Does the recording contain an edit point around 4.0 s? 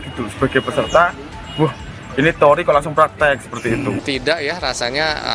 yes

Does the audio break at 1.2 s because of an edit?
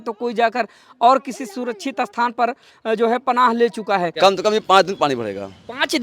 no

